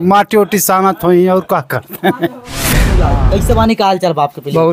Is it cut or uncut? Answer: cut